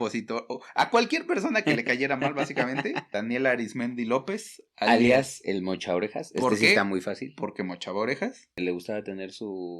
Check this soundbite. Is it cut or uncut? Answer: cut